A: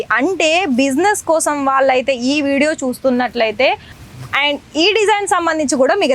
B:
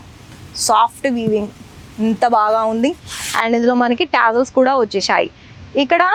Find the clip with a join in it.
A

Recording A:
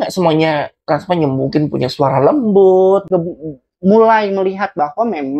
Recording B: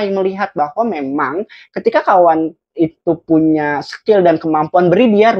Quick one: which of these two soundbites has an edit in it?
A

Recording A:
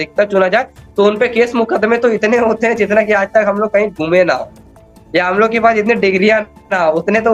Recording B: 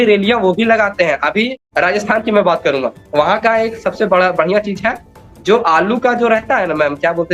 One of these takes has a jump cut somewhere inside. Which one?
B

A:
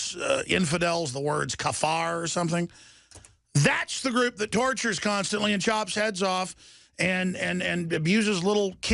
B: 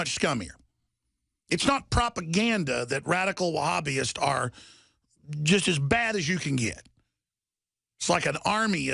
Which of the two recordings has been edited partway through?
A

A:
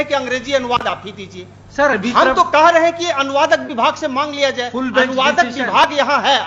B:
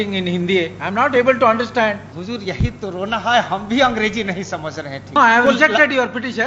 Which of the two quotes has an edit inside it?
B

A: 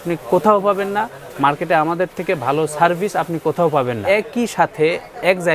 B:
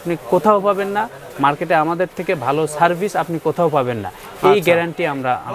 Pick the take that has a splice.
A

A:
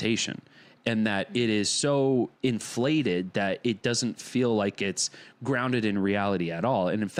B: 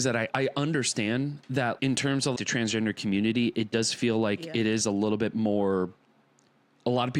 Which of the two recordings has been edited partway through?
B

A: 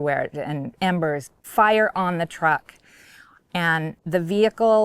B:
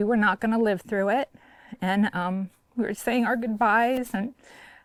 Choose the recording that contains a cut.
A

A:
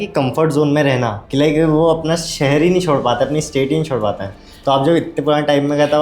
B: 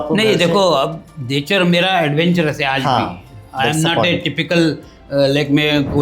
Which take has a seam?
A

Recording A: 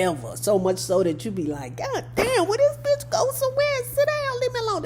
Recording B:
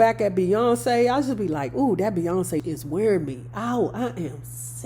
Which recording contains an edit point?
B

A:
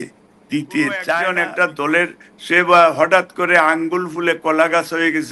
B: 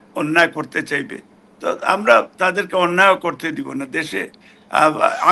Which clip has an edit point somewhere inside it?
A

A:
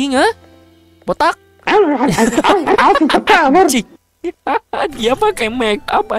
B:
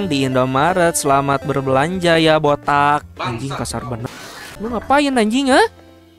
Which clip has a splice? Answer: B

